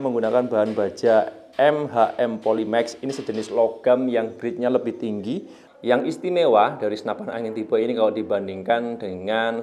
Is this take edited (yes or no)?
yes